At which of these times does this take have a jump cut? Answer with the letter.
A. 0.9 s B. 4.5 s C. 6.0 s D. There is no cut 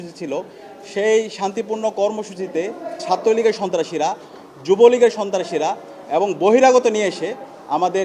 D